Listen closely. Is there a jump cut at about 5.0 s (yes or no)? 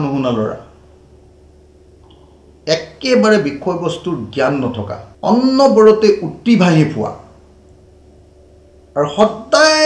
yes